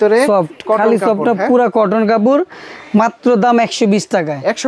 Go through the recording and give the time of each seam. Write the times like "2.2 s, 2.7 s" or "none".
none